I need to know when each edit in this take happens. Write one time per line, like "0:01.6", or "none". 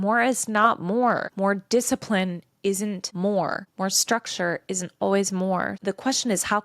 0:01.3
0:03.1
0:03.7
0:05.7